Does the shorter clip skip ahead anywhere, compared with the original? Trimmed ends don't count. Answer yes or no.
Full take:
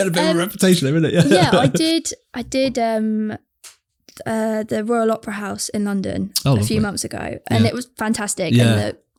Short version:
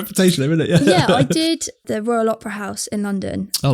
yes